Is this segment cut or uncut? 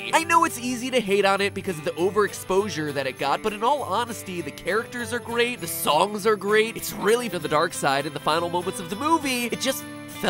uncut